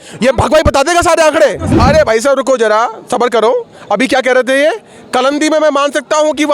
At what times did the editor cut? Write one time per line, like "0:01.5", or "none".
0:01.7